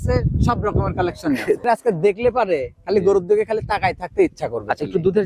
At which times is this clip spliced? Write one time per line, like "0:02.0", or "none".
0:01.6